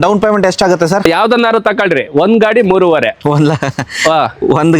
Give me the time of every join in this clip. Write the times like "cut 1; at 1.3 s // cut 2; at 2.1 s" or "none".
cut 1; at 1.0 s